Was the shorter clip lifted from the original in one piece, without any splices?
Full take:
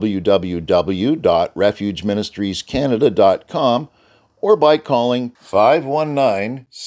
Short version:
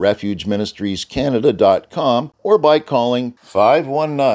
no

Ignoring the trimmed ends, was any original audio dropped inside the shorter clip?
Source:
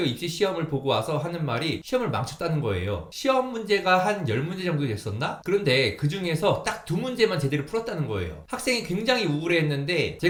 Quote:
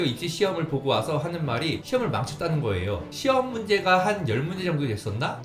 no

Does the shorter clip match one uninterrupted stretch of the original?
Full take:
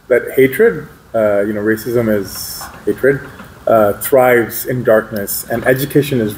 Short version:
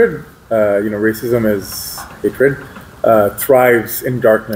yes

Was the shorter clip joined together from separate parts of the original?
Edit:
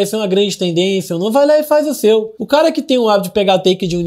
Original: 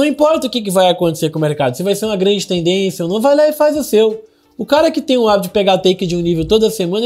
yes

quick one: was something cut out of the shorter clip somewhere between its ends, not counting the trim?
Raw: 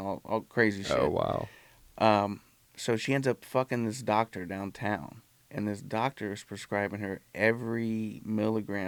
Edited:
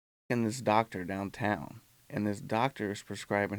no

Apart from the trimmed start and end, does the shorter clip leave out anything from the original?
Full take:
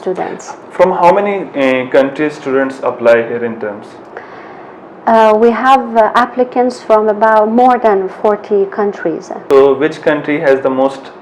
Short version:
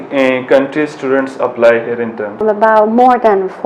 yes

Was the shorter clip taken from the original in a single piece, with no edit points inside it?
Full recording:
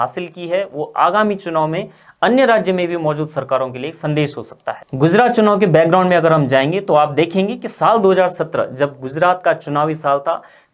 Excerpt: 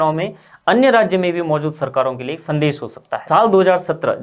no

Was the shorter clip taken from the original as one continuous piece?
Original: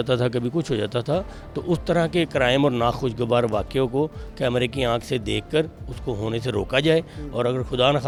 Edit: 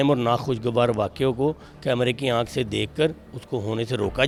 yes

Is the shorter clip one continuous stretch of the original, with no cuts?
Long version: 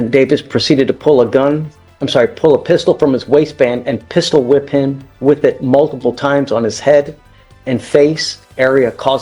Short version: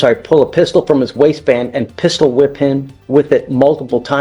yes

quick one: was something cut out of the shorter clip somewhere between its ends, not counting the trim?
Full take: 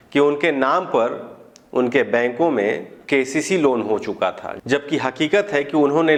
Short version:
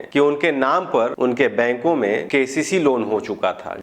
yes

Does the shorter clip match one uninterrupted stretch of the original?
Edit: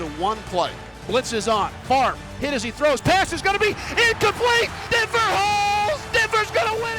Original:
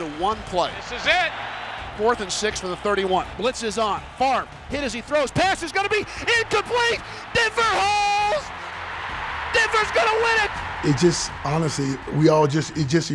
no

